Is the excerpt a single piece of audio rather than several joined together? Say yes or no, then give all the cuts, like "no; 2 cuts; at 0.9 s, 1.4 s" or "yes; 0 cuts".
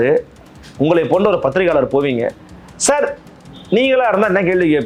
yes; 0 cuts